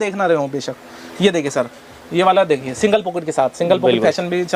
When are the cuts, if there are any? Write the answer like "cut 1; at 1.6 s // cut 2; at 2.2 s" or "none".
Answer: none